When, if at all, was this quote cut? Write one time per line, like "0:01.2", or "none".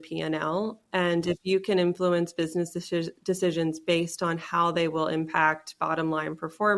none